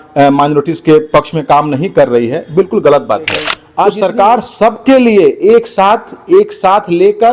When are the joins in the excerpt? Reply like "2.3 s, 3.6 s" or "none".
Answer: 3.6 s

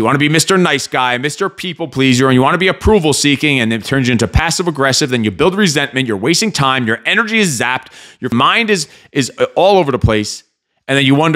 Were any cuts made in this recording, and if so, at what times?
8.3 s

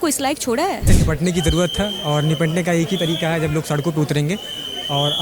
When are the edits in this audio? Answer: 0.9 s

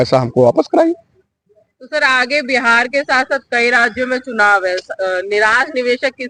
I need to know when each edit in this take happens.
none

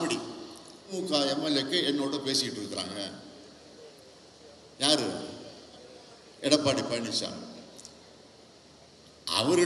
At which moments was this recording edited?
0.9 s

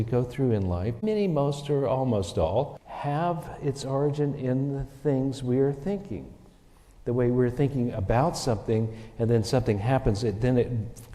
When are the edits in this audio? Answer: 1.0 s, 2.8 s

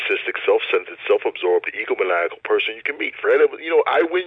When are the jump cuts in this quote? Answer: none

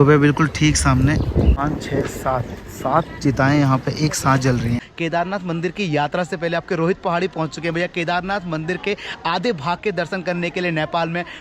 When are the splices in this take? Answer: 1.6 s, 4.9 s

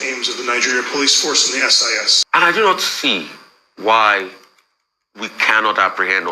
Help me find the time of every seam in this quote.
2.1 s

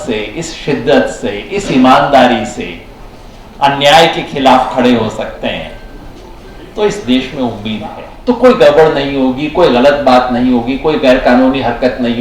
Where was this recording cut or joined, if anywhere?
8.1 s

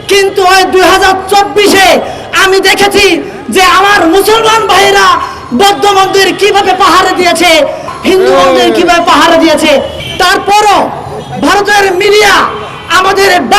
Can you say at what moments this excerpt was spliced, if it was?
7.9 s, 10.0 s

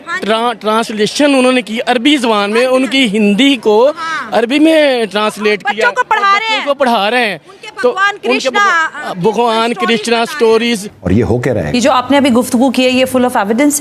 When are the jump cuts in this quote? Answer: 10.9 s

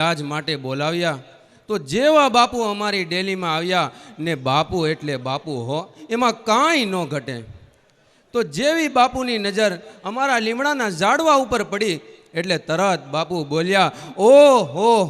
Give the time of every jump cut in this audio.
none

